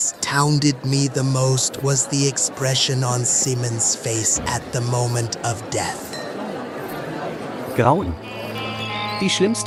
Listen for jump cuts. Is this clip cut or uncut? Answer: uncut